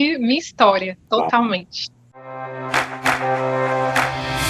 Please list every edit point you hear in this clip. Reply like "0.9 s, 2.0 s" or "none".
1.0 s